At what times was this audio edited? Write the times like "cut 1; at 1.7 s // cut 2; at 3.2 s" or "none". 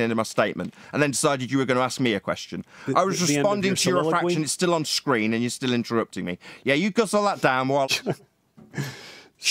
cut 1; at 7.9 s